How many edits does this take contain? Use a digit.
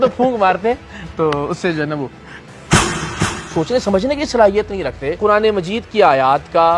2